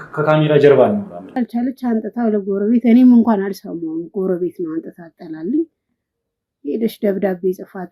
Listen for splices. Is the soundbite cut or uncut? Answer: cut